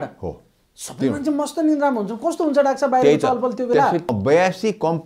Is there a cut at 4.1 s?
yes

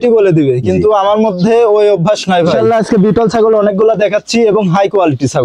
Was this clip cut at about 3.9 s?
no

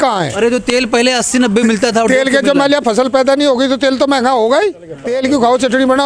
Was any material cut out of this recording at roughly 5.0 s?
yes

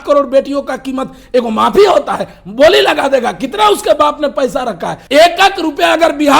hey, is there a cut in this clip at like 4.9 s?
yes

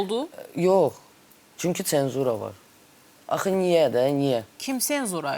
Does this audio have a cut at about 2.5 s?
no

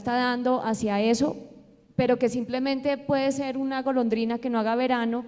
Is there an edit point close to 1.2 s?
no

